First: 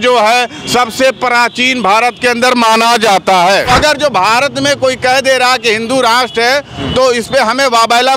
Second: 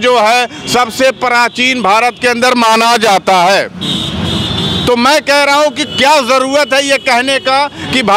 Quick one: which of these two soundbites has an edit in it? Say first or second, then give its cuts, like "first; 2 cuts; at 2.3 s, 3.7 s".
first; 1 cut; at 3.7 s